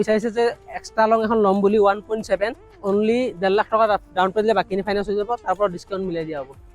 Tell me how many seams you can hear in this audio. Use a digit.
1